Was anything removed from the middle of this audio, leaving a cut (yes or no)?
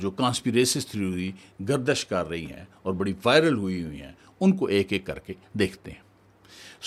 no